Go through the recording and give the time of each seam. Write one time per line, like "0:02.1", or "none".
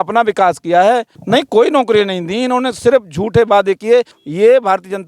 0:01.1
0:04.2